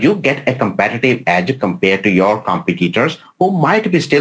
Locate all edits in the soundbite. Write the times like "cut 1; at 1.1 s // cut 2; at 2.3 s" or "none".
none